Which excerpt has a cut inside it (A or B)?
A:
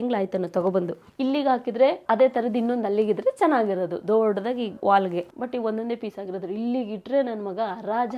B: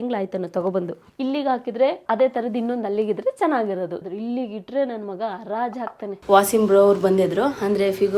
B